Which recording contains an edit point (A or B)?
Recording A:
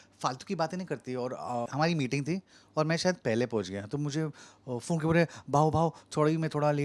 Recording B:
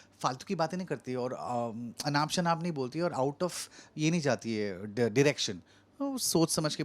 A